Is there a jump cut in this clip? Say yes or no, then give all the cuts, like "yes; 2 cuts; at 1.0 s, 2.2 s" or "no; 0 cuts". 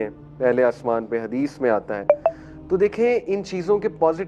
no; 0 cuts